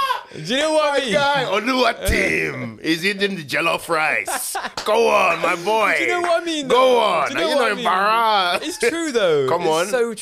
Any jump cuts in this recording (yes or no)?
no